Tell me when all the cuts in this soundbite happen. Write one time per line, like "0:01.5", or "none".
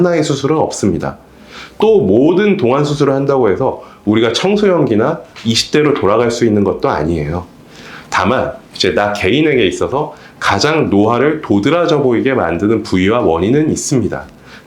none